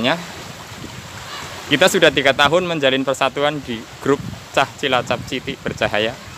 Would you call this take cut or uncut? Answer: uncut